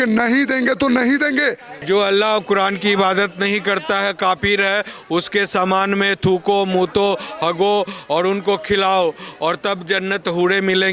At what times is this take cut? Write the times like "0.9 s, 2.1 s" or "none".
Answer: 1.8 s